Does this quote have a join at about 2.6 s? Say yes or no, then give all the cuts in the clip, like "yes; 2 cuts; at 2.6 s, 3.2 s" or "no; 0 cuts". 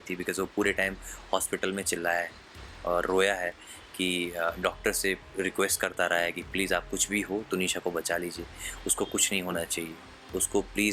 no; 0 cuts